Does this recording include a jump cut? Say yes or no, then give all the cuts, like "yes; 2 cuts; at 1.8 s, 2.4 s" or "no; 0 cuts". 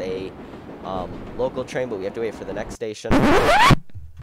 yes; 1 cut; at 3.0 s